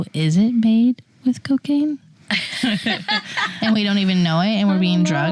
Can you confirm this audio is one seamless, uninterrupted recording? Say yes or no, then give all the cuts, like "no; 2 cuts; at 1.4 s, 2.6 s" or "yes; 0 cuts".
yes; 0 cuts